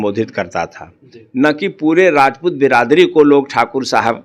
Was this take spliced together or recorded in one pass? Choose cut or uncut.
uncut